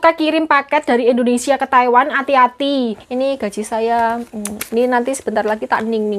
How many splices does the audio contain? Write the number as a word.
one